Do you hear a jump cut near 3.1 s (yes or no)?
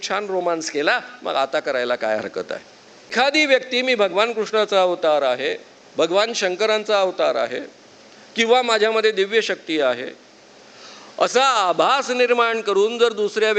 yes